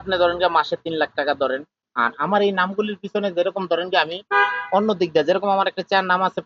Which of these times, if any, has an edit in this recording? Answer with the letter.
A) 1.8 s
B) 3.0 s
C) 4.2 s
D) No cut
A